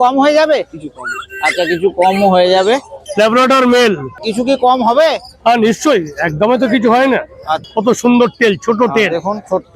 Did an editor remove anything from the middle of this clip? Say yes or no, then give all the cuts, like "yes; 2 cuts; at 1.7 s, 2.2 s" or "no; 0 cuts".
yes; 3 cuts; at 2.9 s, 4.2 s, 7.6 s